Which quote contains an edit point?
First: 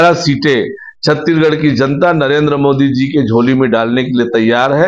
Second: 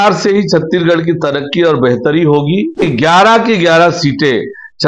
second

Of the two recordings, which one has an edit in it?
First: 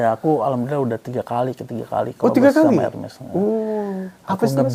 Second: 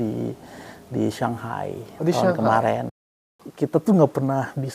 second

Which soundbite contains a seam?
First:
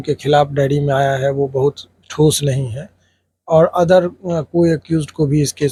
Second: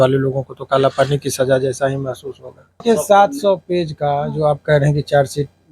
second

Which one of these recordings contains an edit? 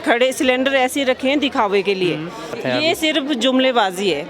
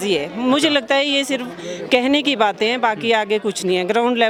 first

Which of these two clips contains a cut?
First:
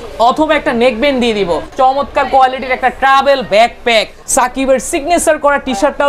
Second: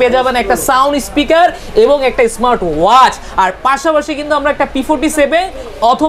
first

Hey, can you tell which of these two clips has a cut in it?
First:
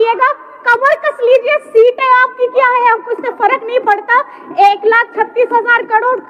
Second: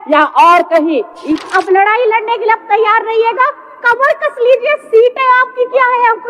second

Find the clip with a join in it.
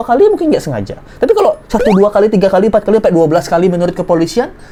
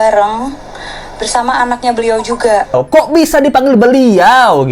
second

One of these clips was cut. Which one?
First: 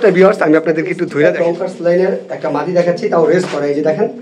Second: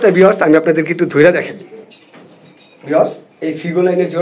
first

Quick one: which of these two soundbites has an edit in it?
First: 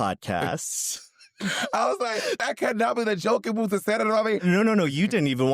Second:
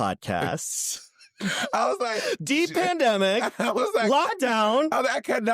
first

